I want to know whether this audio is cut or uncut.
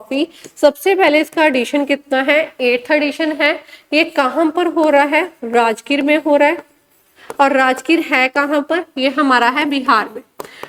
uncut